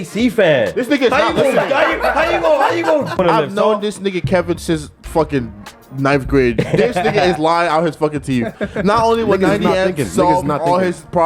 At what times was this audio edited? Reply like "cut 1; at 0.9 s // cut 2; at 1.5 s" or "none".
cut 1; at 3.2 s